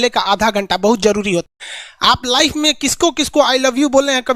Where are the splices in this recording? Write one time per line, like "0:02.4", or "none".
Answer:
0:01.4